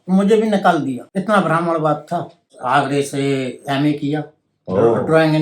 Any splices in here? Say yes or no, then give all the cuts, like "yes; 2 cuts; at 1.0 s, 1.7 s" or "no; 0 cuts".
yes; 2 cuts; at 1.1 s, 2.5 s